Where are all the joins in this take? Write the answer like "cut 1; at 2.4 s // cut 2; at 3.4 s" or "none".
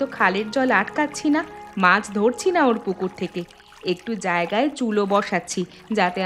none